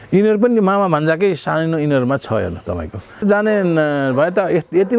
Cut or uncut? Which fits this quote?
cut